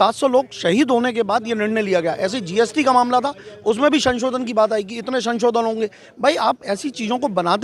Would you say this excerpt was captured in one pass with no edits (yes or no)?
yes